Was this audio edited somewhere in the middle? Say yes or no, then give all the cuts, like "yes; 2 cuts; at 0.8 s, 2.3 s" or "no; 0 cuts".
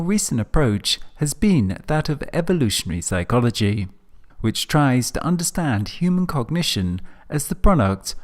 no; 0 cuts